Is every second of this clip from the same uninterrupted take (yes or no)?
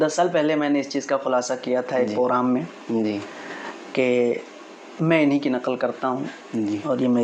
yes